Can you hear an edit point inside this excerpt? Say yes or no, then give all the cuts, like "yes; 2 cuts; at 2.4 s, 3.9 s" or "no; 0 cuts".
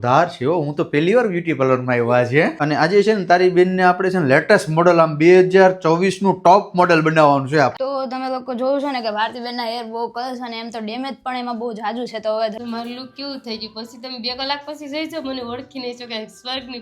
yes; 3 cuts; at 2.6 s, 7.7 s, 12.6 s